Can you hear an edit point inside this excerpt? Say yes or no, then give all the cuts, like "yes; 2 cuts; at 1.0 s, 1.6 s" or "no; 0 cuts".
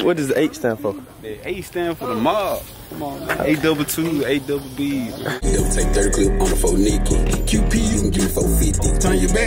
yes; 1 cut; at 5.4 s